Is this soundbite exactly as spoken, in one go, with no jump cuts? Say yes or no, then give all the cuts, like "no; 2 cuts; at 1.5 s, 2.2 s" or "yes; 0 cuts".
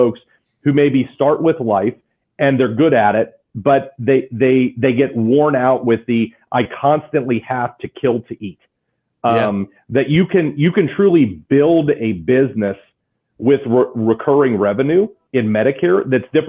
yes; 0 cuts